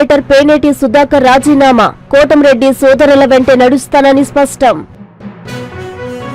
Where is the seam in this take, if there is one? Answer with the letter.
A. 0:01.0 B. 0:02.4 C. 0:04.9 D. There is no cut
C